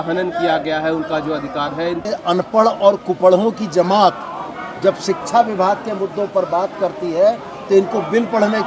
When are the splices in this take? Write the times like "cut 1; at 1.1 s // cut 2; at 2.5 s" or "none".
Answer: cut 1; at 2.1 s